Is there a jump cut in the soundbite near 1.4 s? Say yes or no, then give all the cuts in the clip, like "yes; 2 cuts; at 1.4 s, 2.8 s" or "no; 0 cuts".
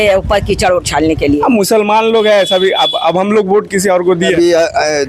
yes; 2 cuts; at 1.4 s, 4.3 s